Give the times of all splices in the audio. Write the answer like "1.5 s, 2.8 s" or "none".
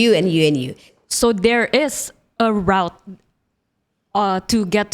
0.9 s